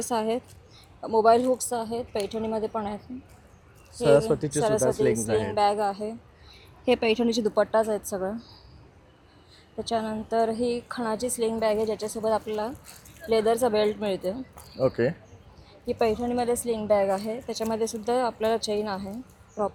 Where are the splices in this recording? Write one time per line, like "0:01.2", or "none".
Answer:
none